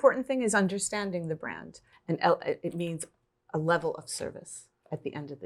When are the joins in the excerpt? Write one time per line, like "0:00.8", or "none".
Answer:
0:01.9